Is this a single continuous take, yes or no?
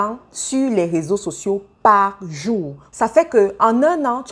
no